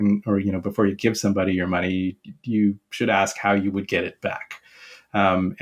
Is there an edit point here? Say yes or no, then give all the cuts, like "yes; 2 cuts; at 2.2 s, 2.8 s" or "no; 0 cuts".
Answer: no; 0 cuts